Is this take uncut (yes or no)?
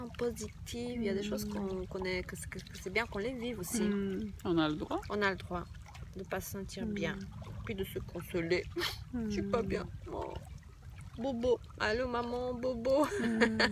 yes